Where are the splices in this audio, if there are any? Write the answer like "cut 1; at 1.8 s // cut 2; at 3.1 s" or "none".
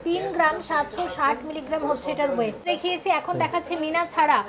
cut 1; at 2.6 s